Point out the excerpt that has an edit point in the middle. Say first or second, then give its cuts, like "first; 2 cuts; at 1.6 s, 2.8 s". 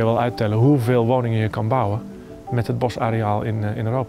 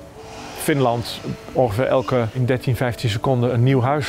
second; 1 cut; at 2.4 s